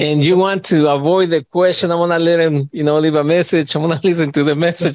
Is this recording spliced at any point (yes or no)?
no